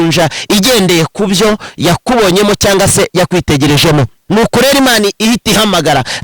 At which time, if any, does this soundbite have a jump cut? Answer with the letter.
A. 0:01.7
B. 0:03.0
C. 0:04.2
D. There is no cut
C